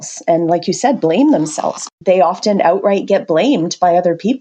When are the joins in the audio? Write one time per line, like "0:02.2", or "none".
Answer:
0:01.9